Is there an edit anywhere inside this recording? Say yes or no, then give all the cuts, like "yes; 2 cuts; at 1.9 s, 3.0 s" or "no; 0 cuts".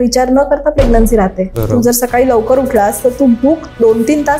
yes; 1 cut; at 1.6 s